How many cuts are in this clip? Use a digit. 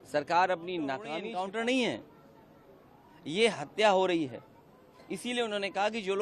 1